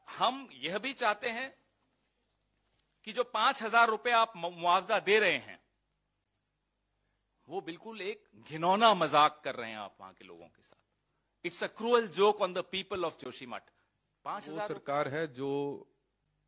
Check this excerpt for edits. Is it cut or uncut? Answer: cut